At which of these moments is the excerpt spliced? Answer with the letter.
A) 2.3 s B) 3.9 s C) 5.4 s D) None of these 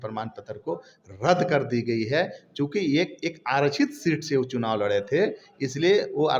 D